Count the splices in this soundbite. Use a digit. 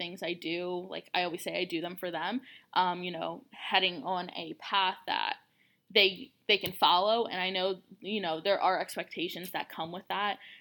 0